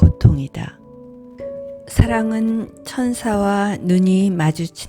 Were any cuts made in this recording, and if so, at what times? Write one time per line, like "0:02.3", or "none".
0:01.3